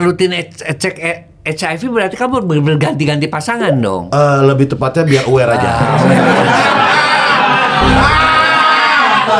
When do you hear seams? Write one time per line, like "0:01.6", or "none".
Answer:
none